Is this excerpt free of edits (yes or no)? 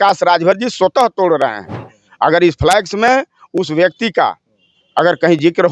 no